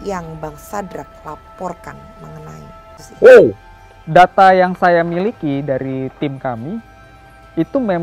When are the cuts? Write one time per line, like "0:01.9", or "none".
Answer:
0:03.0